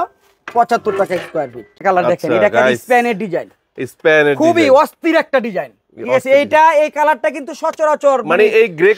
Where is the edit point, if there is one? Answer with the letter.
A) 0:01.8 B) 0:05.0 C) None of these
A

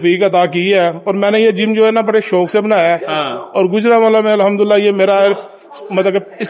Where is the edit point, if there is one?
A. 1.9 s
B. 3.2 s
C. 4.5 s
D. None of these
D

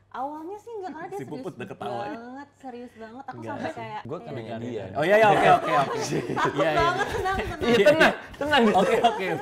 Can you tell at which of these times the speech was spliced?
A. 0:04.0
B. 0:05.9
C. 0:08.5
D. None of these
A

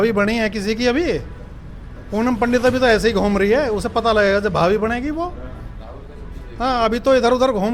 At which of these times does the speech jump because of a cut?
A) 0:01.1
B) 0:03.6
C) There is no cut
C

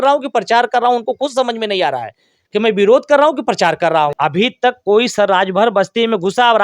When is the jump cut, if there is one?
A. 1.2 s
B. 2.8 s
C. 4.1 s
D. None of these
C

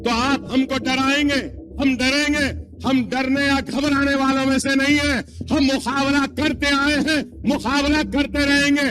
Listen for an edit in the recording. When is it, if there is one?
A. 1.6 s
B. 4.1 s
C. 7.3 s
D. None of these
A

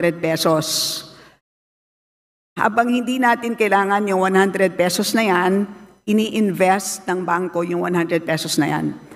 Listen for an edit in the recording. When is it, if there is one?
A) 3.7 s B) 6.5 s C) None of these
C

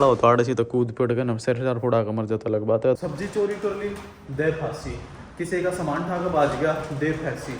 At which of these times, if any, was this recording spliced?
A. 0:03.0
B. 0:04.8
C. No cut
A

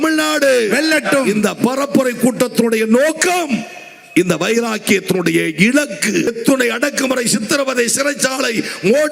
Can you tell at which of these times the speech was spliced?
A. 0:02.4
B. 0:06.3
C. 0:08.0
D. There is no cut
B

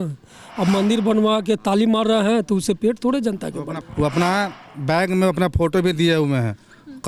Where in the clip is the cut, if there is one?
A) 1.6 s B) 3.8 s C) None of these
B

